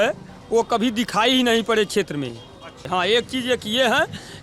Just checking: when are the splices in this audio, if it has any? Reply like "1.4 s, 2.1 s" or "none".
2.8 s